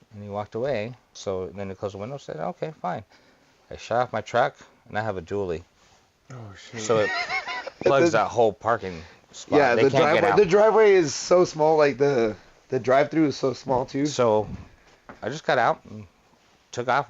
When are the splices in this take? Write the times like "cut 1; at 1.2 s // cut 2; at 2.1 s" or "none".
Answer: cut 1; at 1.0 s